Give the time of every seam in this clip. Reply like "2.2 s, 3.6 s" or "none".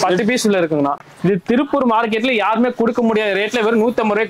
1.0 s